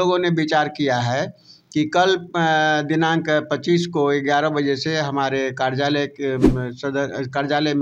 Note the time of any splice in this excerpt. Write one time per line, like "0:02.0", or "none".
none